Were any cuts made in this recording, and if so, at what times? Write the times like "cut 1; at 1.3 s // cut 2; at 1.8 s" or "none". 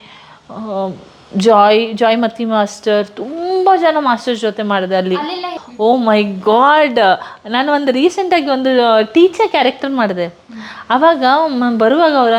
cut 1; at 5.1 s